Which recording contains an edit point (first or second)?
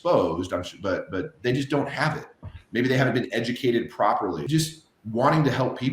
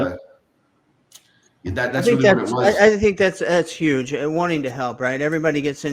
first